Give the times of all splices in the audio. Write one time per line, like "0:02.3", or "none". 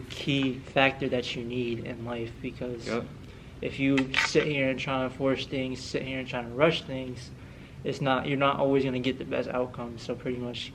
none